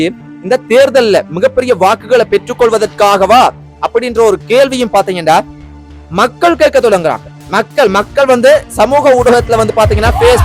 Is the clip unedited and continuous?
yes; 0 cuts

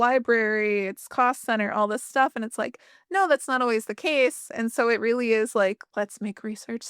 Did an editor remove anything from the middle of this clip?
yes; 1 cut; at 5.8 s

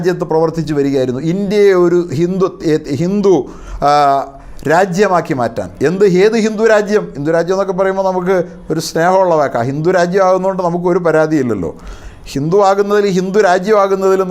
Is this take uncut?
yes; 0 cuts

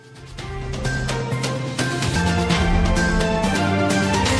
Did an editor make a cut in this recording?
yes; 1 cut; at 1.2 s

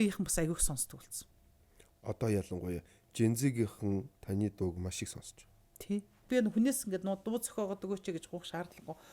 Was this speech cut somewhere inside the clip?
yes; 1 cut; at 6.3 s

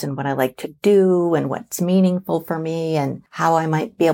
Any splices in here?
yes; 1 cut; at 3.2 s

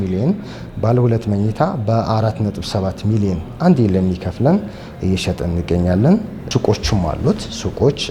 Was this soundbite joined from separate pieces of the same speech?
yes; 1 cut; at 6.4 s

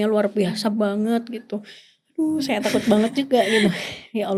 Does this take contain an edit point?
no; 0 cuts

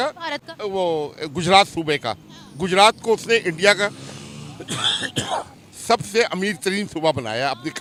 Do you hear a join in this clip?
no; 0 cuts

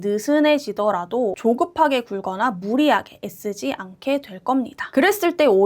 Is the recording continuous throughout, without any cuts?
no; 2 cuts; at 1.4 s, 4.8 s

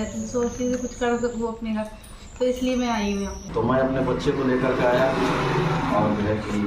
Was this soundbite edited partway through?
yes; 1 cut; at 3.4 s

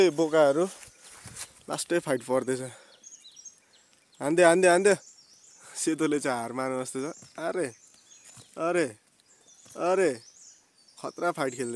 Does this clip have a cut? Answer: no; 0 cuts

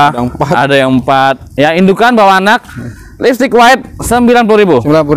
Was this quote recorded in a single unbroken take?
yes; 0 cuts

